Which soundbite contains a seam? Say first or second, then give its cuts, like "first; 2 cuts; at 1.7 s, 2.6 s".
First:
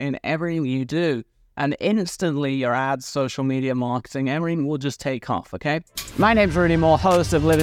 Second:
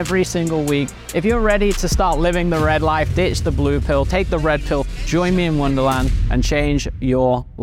first; 1 cut; at 6.0 s